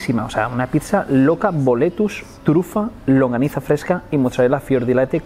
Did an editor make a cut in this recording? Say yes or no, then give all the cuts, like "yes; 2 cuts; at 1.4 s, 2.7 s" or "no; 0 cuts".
no; 0 cuts